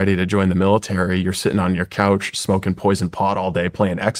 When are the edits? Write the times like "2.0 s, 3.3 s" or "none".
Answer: none